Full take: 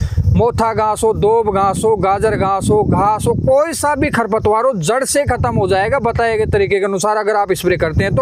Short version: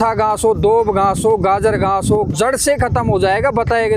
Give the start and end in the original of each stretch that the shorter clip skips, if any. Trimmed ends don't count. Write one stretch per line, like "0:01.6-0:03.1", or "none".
0:02.9-0:04.8

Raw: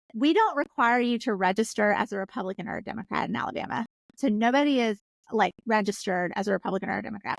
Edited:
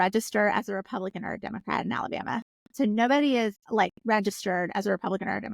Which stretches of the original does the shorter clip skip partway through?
0:05.0-0:05.2

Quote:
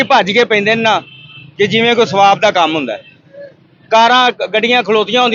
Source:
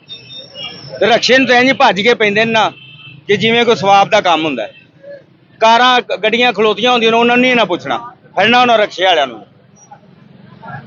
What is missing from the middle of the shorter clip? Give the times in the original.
none

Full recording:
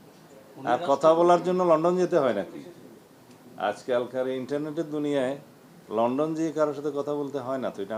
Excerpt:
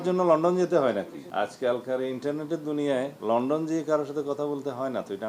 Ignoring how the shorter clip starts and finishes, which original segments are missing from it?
0:02.6-0:03.5
0:05.4-0:05.8

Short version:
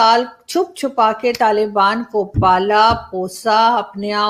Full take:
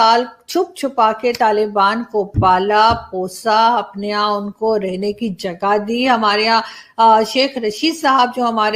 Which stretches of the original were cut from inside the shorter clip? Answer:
none

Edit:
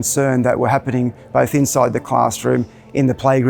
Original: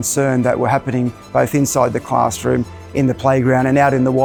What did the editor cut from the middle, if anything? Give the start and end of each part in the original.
none

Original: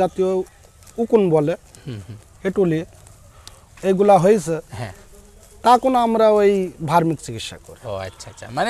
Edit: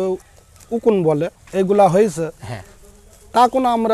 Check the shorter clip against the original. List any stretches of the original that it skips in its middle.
0:01.7-0:03.7

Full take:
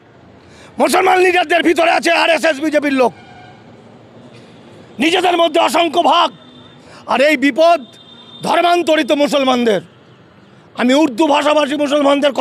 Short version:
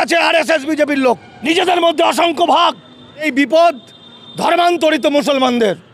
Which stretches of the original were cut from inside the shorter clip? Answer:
0:03.3-0:04.9
0:06.8-0:07.3

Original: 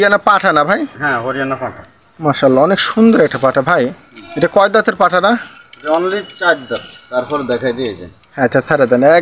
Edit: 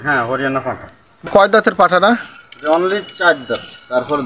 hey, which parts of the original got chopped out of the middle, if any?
0:02.2-0:04.5

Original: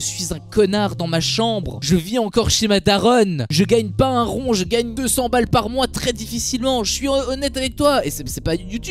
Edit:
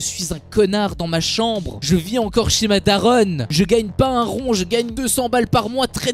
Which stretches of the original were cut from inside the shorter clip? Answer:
none

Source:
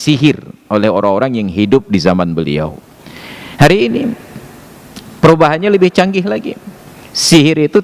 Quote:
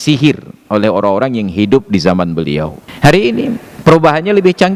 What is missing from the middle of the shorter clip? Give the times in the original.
0:02.8-0:03.4
0:04.2-0:05.0

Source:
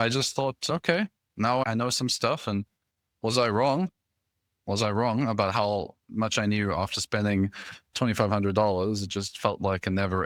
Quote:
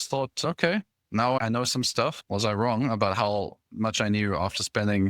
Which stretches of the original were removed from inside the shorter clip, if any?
0:02.4-0:04.5

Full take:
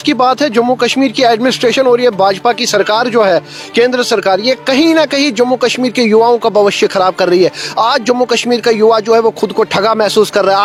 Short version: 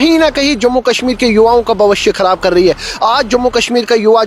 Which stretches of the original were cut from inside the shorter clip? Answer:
none

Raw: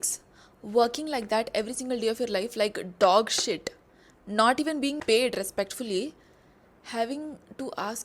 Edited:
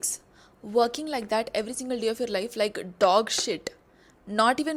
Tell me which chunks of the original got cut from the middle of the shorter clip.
none

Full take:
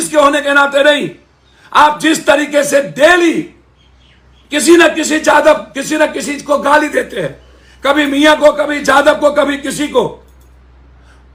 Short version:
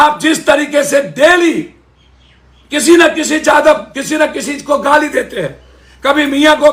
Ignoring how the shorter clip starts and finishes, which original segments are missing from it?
none

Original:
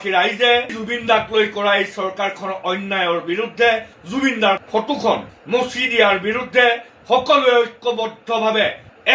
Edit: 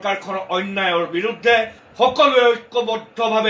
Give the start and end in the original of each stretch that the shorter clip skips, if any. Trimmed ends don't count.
0:04.0-0:06.9

